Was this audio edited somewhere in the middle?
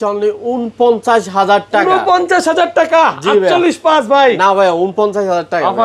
no; 0 cuts

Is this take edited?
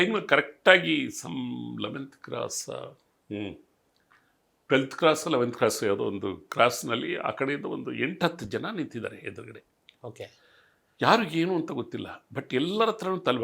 no; 0 cuts

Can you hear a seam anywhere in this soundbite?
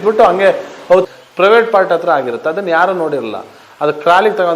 yes; 1 cut; at 1.1 s

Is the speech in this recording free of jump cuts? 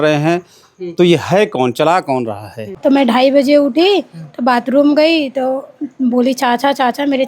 no; 1 cut; at 2.6 s

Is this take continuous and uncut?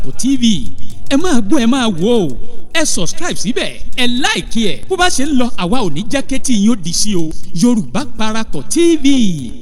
yes; 0 cuts

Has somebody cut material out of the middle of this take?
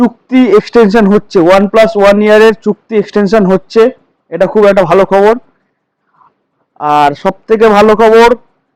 no; 0 cuts

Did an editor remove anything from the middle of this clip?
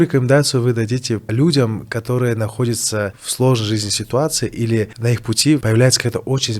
yes; 3 cuts; at 1.3 s, 3.2 s, 5.1 s

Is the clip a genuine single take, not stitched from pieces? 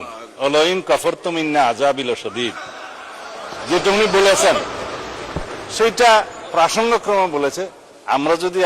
yes; 0 cuts

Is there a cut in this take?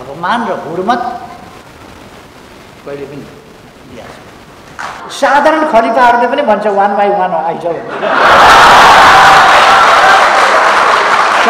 yes; 1 cut; at 5.0 s

